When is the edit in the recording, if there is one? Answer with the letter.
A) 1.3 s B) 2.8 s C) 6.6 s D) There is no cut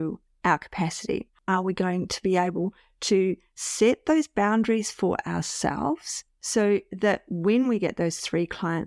A